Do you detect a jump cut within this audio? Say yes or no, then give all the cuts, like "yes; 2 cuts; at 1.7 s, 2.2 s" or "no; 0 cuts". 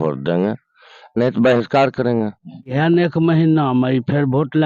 yes; 1 cut; at 2.7 s